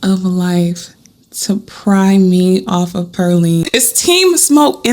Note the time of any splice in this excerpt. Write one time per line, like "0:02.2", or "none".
0:03.7